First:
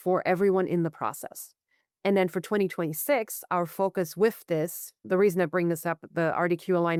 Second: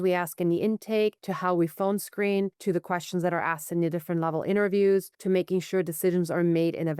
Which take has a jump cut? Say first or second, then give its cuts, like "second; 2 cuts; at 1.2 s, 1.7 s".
second; 3 cuts; at 1.3 s, 2.6 s, 5.1 s